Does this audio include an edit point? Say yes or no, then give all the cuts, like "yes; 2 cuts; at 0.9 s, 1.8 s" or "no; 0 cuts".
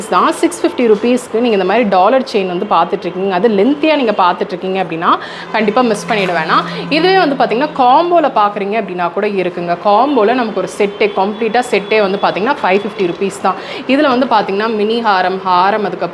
no; 0 cuts